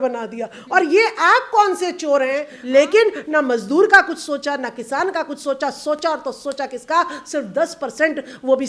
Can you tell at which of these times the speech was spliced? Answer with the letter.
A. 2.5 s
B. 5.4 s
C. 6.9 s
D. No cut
A